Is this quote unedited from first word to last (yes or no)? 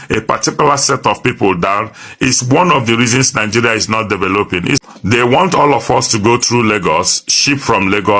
no